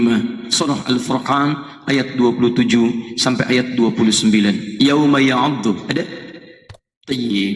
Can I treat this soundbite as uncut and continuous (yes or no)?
no